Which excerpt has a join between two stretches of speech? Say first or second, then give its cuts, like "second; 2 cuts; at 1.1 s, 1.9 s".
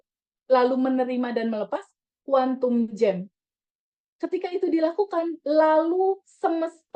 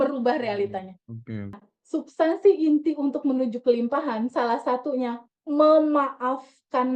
second; 1 cut; at 1.7 s